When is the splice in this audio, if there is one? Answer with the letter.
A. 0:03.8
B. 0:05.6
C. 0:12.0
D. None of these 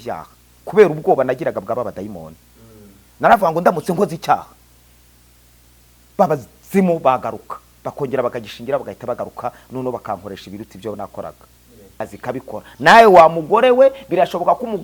C